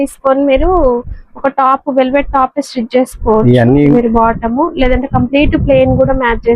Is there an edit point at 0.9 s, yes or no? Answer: no